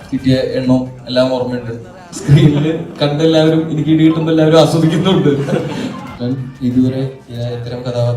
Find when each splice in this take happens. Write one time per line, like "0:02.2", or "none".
0:02.1
0:06.1